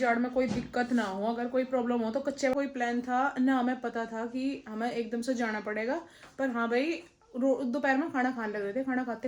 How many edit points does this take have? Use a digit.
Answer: 1